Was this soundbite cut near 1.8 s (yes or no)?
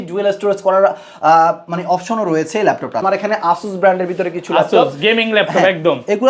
no